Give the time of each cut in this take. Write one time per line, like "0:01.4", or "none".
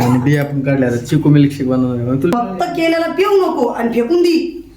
0:02.3